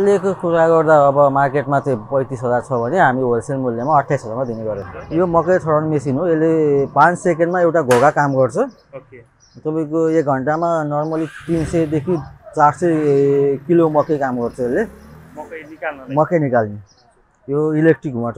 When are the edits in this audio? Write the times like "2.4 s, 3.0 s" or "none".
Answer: 4.9 s